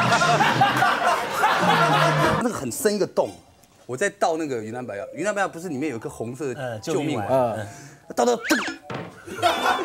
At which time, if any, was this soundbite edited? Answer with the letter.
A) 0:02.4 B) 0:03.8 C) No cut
A